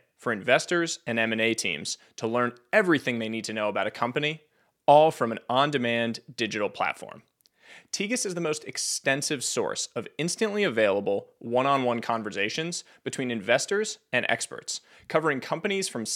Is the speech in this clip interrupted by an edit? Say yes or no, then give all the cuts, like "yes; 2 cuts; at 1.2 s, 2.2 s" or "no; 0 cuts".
no; 0 cuts